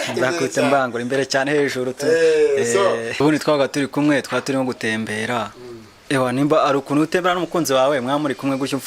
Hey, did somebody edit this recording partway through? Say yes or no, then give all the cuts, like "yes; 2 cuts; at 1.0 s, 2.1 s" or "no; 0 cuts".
yes; 1 cut; at 3.2 s